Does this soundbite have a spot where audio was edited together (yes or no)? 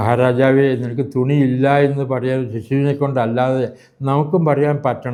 no